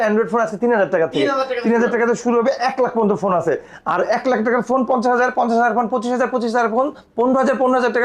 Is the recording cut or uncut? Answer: uncut